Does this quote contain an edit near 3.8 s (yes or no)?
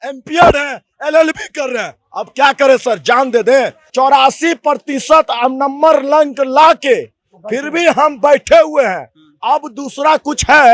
yes